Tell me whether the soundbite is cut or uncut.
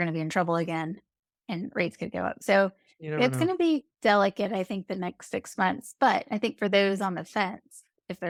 uncut